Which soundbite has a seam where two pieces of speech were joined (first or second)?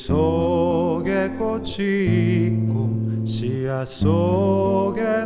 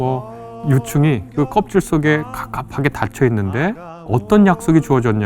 second